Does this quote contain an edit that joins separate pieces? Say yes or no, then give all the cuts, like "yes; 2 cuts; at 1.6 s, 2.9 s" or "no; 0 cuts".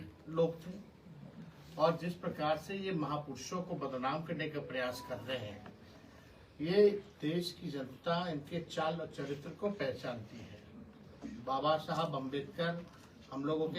no; 0 cuts